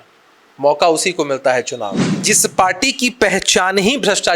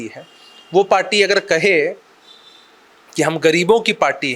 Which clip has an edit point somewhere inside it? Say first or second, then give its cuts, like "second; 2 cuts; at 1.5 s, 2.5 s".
first; 1 cut; at 2.1 s